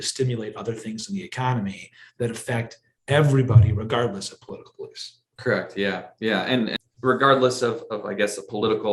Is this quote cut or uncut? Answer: cut